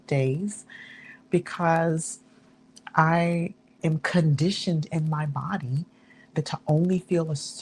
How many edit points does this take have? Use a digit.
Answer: 2